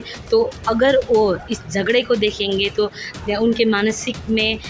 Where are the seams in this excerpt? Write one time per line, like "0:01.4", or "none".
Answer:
none